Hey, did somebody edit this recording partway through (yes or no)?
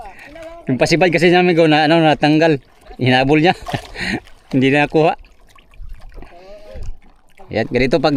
no